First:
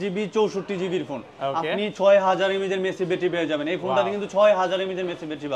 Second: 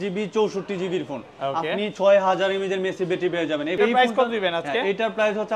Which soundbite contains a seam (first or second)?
second